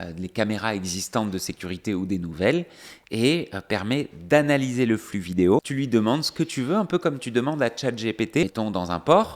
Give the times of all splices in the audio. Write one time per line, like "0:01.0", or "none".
0:05.7
0:08.4